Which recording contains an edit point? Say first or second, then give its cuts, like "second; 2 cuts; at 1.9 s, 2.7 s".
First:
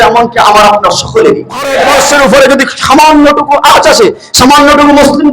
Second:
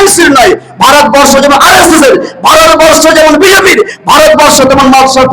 first; 1 cut; at 1.8 s